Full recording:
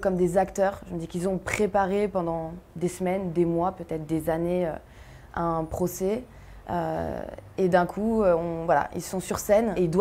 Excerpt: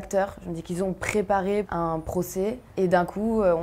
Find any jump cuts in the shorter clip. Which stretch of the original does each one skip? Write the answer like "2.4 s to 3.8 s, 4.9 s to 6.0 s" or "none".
2.1 s to 5.3 s, 6.3 s to 7.4 s

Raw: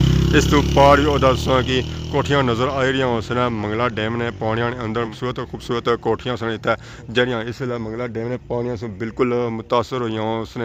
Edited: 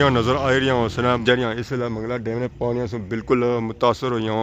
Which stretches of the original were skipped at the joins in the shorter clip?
3.5 s to 7.1 s

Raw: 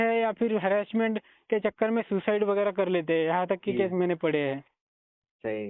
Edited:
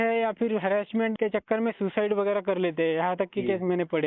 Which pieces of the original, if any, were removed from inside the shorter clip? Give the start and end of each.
1.1 s to 1.4 s

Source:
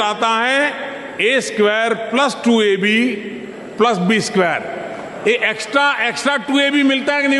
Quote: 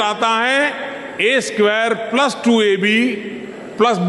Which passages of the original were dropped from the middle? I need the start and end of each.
none

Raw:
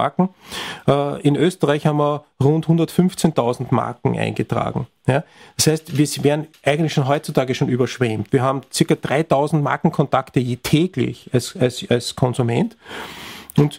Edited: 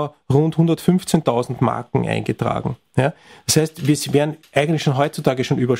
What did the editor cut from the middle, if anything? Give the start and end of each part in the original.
none

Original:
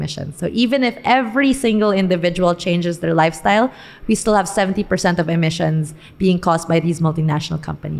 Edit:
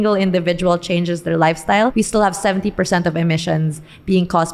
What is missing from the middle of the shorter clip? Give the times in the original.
3.7 s to 4.1 s

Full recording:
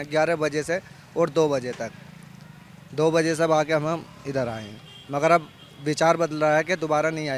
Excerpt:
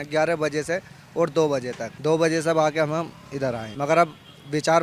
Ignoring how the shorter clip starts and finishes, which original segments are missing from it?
1.9 s to 2.8 s, 4.6 s to 5.0 s

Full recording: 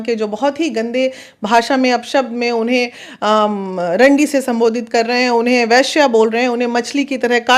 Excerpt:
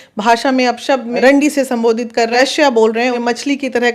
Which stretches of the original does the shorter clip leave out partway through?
2.4 s to 3.9 s, 5.1 s to 5.7 s, 6.5 s to 6.7 s

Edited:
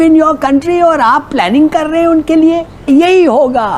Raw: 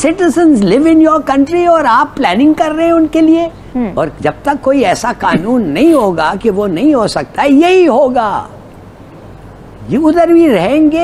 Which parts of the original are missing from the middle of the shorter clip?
3.7 s to 7.5 s

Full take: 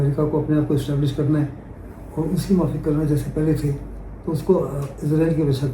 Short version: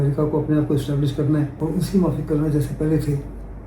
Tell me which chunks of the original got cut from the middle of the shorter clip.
1.5 s to 2.1 s

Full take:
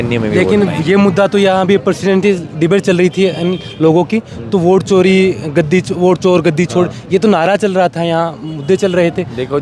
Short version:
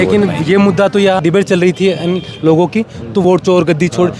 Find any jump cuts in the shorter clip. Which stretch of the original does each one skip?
1.6 s to 2.6 s, 4.6 s to 6.0 s

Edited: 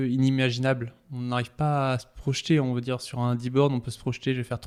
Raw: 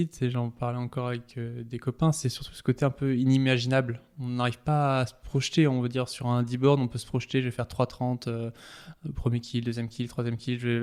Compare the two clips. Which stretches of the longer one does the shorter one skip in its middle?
none

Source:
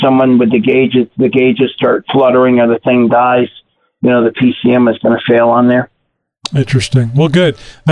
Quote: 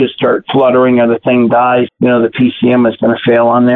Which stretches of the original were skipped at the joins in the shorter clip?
3.5 s to 3.9 s

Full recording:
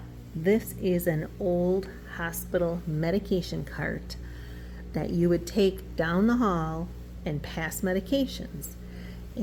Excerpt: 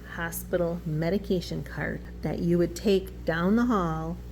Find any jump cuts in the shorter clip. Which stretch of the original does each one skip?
4.1 s to 4.8 s

